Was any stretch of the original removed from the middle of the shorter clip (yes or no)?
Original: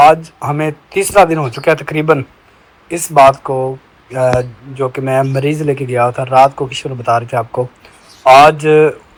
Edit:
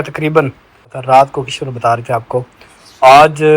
yes